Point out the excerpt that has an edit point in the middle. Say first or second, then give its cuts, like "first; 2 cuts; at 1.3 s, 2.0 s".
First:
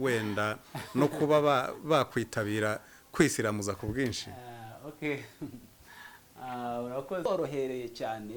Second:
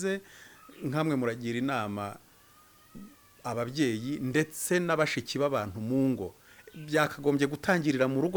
first; 1 cut; at 7.3 s